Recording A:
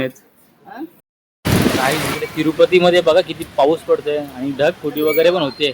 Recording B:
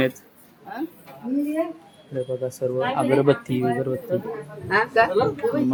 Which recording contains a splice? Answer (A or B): A